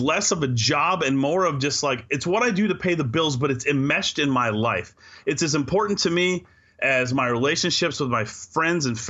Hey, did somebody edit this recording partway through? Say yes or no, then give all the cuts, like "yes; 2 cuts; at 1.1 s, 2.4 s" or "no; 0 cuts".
no; 0 cuts